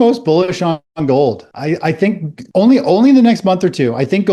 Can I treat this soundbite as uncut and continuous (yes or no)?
no